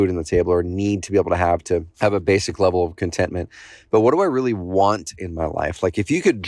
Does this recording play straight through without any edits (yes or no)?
no